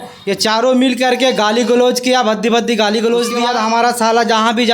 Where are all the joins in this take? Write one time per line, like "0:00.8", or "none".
0:03.4